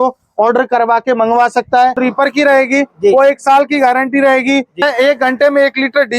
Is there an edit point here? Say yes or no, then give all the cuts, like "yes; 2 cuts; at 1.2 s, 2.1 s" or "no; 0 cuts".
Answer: yes; 2 cuts; at 2.0 s, 4.8 s